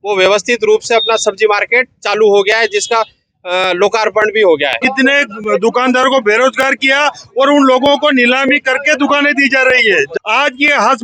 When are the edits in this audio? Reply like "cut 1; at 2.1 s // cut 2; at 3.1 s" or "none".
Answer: cut 1; at 4.8 s // cut 2; at 10.1 s